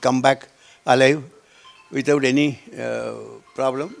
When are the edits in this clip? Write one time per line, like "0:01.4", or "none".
none